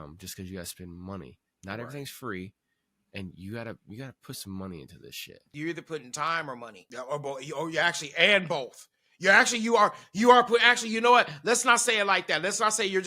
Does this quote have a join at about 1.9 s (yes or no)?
no